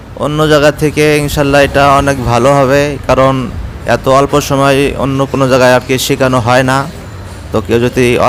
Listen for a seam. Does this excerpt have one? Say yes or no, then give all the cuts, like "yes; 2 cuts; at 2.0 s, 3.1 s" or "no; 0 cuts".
no; 0 cuts